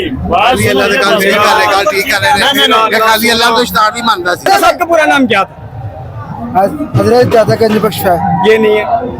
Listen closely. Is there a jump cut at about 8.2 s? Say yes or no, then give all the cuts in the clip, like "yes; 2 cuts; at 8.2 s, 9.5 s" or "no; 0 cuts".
no; 1 cut; at 4.4 s